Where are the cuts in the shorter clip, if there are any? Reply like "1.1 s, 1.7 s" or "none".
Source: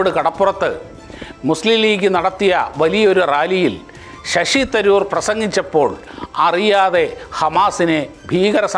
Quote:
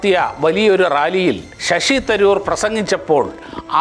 1.5 s